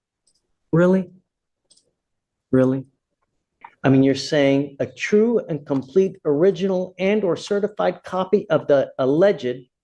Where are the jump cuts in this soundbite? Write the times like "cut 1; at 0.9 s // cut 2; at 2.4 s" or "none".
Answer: cut 1; at 3.6 s